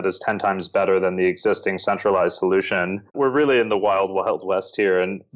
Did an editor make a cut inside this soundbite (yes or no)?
yes